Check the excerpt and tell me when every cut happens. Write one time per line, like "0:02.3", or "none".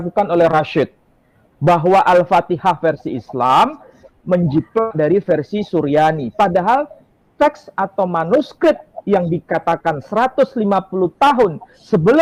none